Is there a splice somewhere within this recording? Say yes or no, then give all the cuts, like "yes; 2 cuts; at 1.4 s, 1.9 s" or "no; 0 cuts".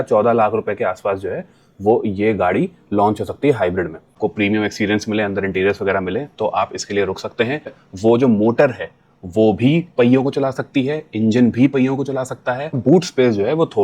yes; 3 cuts; at 4.1 s, 7.8 s, 12.7 s